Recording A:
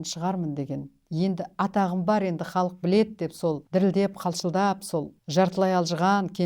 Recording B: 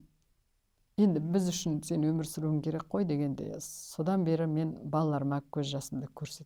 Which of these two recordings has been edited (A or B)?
A